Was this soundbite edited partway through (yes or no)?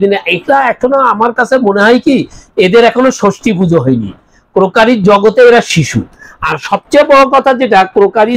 no